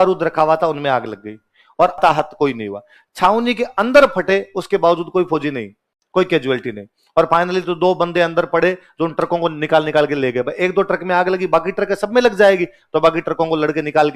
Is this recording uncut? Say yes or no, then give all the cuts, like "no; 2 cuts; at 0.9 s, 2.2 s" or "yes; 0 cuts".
no; 1 cut; at 2.0 s